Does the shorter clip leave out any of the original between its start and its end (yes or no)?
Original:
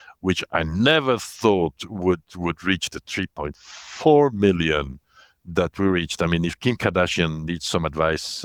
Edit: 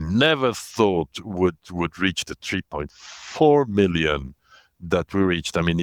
no